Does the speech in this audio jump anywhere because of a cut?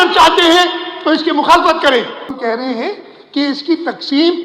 yes; 1 cut; at 2.4 s

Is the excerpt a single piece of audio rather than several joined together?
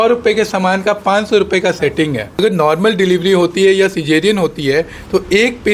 no; 1 cut; at 2.4 s

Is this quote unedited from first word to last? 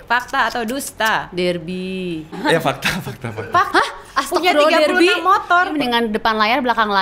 no; 2 cuts; at 2.4 s, 5.7 s

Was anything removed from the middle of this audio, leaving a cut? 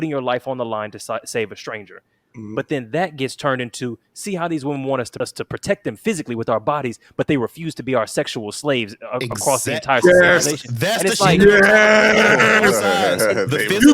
yes; 1 cut; at 5.1 s

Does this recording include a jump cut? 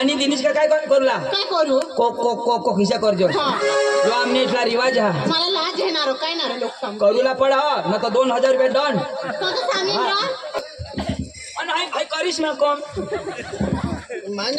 yes; 1 cut; at 10.6 s

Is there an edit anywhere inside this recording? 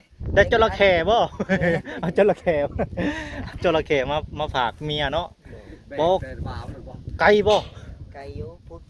no; 0 cuts

